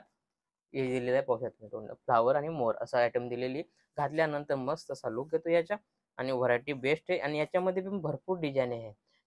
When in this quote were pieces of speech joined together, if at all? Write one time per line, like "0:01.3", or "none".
none